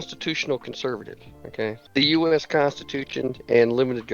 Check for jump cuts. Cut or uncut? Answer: cut